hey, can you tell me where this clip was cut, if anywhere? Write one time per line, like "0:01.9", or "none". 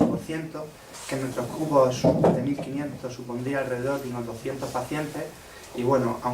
0:01.0